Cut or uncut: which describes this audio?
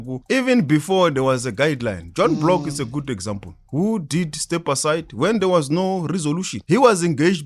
cut